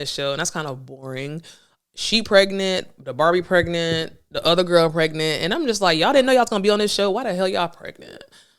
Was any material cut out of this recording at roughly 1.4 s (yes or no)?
no